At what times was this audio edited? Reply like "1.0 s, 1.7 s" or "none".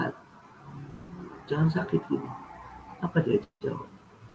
none